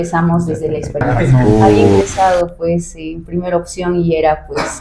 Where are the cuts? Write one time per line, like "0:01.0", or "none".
0:02.0